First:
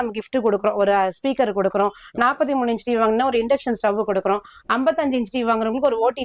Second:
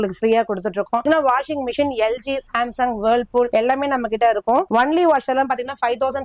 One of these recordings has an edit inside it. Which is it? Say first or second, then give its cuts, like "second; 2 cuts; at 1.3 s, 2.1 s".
second; 3 cuts; at 1.0 s, 3.5 s, 4.7 s